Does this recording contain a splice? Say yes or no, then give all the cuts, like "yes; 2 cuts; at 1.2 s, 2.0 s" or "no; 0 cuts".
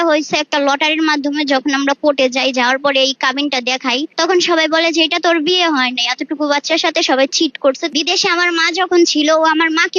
yes; 2 cuts; at 4.1 s, 7.9 s